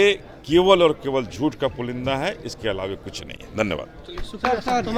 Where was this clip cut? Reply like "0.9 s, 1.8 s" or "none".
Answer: none